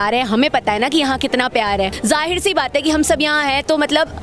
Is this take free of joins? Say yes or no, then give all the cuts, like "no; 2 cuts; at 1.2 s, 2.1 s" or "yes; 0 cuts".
no; 1 cut; at 1.9 s